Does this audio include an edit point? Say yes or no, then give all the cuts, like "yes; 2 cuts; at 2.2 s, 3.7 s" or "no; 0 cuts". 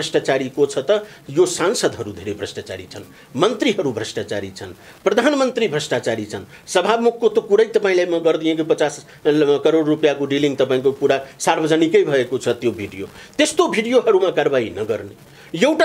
no; 0 cuts